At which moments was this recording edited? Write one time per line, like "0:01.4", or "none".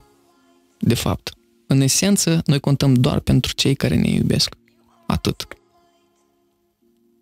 none